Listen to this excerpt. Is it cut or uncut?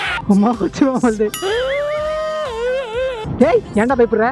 cut